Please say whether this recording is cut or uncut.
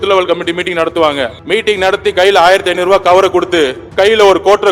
cut